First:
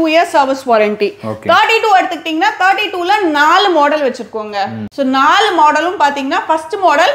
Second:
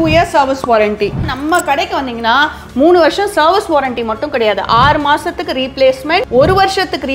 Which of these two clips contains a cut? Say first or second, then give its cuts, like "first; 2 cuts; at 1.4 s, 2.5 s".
second; 2 cuts; at 1.3 s, 6.3 s